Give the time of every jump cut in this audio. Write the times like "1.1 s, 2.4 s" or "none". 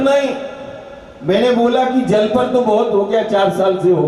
none

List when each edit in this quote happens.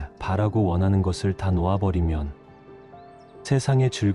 none

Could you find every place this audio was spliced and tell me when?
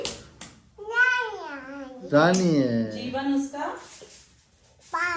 none

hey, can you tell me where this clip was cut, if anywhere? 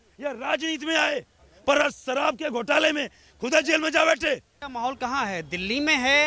4.6 s

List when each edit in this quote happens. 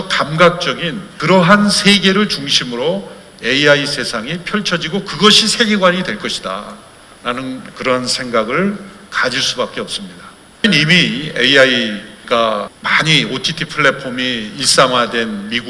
10.6 s, 12.8 s

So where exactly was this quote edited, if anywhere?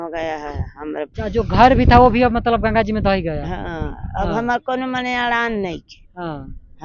1.1 s

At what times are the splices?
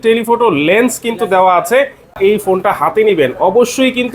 2.2 s

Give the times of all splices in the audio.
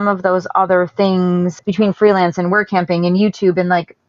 1.6 s

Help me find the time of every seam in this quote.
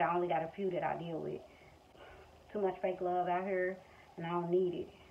1.9 s

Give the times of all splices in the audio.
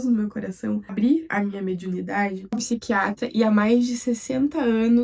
1.3 s, 2.6 s

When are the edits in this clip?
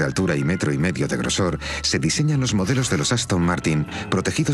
2.5 s

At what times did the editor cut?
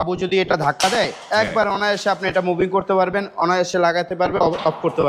none

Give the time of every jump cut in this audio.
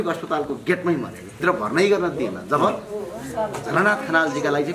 1.4 s

